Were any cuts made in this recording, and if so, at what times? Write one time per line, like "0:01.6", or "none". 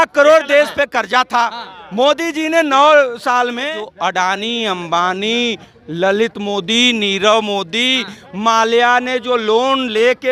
0:03.8